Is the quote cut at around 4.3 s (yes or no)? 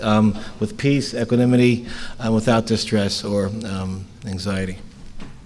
no